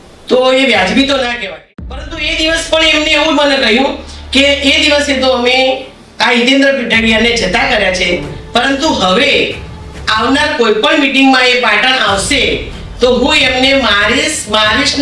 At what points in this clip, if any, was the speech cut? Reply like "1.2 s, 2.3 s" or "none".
1.5 s